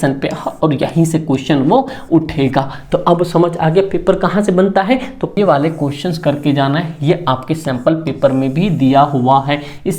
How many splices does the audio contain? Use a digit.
1